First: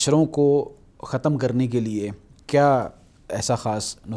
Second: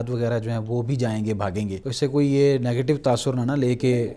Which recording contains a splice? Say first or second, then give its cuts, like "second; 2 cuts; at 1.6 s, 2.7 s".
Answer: second; 1 cut; at 1.8 s